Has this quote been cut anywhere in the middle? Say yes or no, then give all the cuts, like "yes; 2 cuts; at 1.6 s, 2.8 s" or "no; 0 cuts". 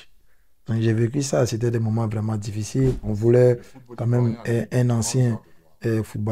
yes; 1 cut; at 3.1 s